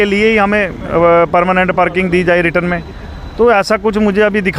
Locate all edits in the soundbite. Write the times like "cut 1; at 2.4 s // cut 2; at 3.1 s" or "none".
none